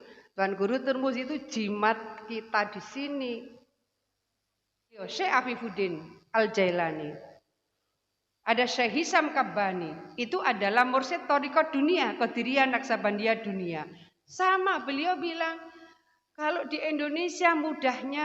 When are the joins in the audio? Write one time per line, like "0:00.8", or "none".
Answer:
0:05.1